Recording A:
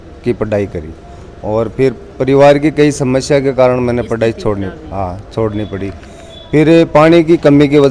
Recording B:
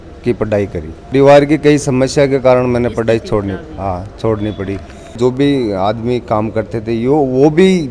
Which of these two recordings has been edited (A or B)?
B